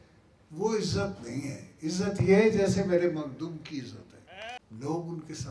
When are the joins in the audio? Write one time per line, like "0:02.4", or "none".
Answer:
0:04.6